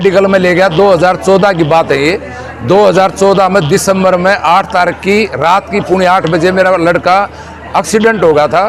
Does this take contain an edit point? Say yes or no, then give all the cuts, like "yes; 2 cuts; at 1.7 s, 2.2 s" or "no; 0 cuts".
no; 0 cuts